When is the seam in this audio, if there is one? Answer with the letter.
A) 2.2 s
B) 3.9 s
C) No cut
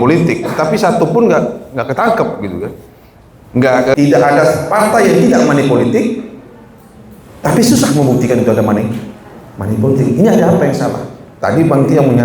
B